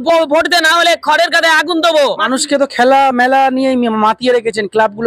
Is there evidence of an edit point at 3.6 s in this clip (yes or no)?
no